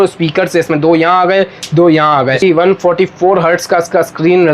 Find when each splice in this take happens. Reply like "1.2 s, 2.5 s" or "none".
2.4 s